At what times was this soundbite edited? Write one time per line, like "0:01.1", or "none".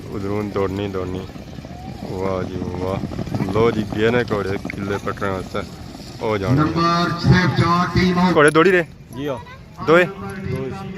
0:08.3